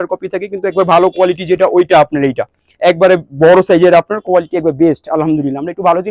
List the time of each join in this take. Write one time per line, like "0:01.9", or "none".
none

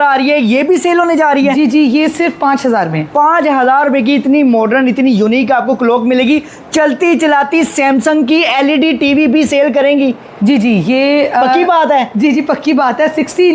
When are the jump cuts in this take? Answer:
none

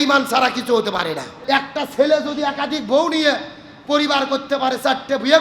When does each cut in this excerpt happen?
0:01.3

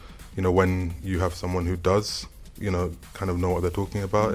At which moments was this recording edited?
none

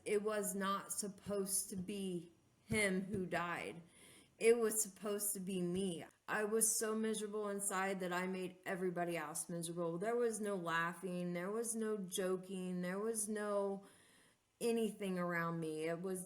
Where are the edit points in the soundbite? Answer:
0:06.1

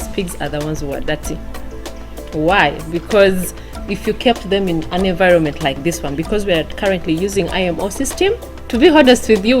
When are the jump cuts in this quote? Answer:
0:08.5

